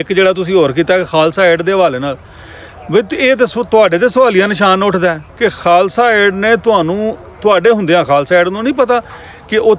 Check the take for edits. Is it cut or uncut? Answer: uncut